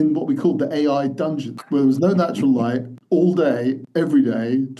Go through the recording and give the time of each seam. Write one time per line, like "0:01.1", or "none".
0:01.5
0:02.9
0:03.8